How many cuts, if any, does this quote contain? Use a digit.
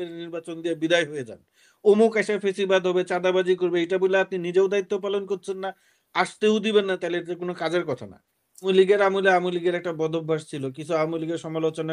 1